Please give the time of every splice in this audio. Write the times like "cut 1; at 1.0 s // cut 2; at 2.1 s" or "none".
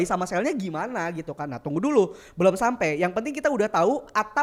none